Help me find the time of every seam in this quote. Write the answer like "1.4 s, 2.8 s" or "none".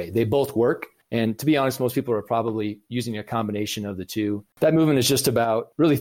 0.9 s, 4.5 s